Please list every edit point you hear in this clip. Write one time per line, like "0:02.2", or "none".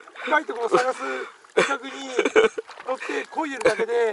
none